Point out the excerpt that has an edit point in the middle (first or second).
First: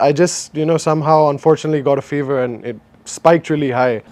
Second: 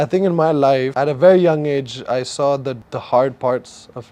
second